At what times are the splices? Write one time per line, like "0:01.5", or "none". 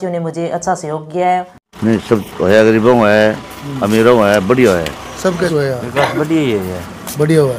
0:01.6
0:05.5